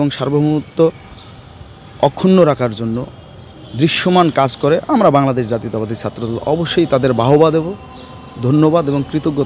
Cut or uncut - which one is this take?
uncut